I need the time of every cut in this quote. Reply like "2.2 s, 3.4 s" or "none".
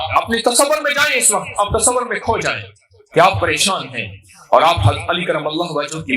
none